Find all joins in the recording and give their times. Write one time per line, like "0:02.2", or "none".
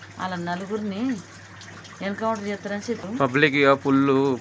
0:03.1